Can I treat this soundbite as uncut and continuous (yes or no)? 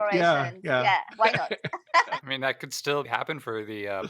no